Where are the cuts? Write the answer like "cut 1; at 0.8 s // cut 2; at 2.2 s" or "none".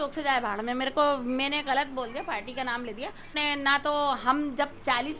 cut 1; at 3.4 s

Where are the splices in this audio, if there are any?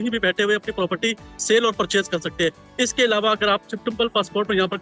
none

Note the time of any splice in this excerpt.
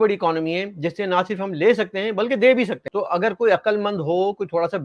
cut 1; at 2.8 s

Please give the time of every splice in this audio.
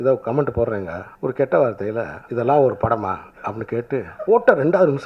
cut 1; at 1.0 s // cut 2; at 2.2 s // cut 3; at 4.1 s

